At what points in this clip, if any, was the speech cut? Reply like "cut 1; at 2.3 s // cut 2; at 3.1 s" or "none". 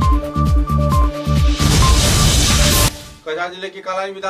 cut 1; at 3.1 s